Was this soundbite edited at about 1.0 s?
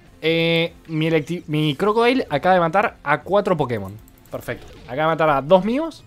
no; 1 cut; at 4.7 s

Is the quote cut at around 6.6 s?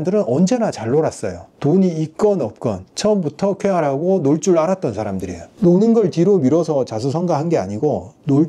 no; 0 cuts

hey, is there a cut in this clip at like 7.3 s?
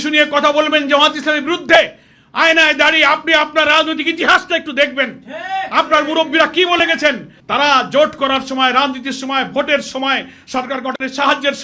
no; 0 cuts

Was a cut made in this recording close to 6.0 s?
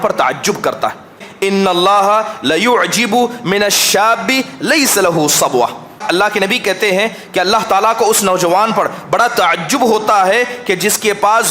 yes; 2 cuts; at 1.3 s, 6.0 s

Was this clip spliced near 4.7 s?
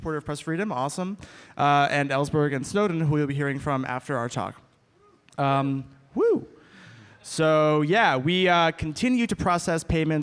yes; 1 cut; at 4.7 s

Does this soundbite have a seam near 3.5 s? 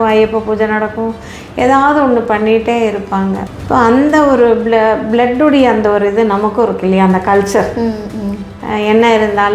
yes; 1 cut; at 3.5 s

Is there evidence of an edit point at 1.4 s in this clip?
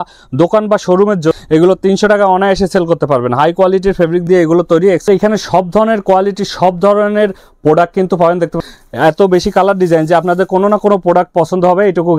yes; 3 cuts; at 1.4 s, 5.0 s, 8.6 s

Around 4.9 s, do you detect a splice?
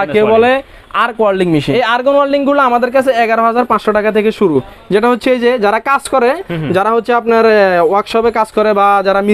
no; 1 cut; at 1.7 s

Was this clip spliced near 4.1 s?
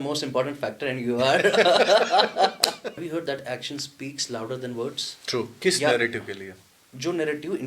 no; 2 cuts; at 2.9 s, 5.5 s

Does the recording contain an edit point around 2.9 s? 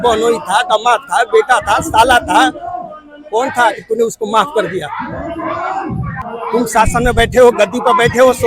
no; 1 cut; at 6.2 s

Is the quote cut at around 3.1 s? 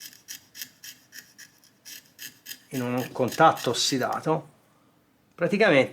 yes; 1 cut; at 3.1 s

